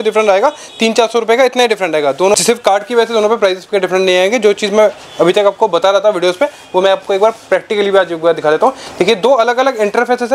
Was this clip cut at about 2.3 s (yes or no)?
no